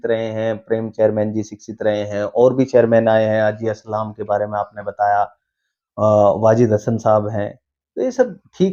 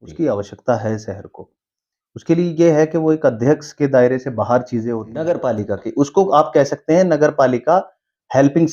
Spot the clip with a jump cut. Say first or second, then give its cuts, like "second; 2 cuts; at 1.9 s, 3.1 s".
second; 1 cut; at 5.1 s